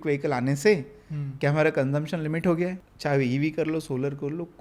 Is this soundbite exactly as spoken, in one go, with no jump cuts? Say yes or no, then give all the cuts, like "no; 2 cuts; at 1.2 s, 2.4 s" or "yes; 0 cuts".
no; 1 cut; at 2.9 s